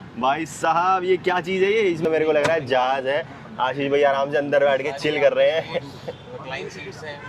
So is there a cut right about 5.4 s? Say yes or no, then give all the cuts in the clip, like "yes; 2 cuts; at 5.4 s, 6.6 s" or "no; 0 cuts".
no; 1 cut; at 2.0 s